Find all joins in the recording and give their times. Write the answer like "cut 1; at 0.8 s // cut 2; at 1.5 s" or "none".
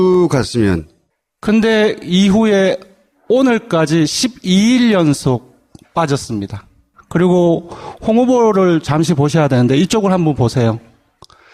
none